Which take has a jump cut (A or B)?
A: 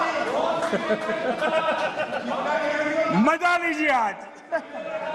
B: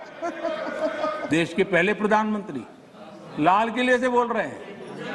B